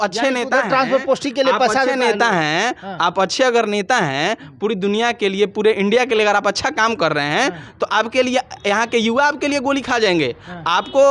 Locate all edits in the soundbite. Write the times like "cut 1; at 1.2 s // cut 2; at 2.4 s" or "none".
none